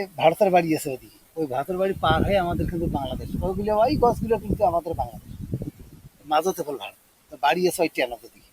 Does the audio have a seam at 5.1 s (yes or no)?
no